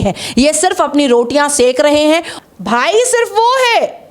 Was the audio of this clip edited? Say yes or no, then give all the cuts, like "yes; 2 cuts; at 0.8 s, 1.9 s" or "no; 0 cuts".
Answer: yes; 1 cut; at 2.3 s